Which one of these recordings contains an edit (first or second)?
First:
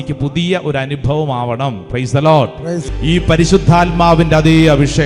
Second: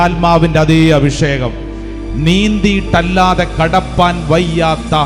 first